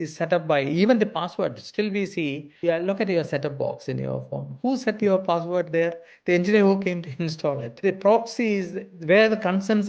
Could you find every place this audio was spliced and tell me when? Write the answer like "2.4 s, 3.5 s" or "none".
2.5 s, 7.7 s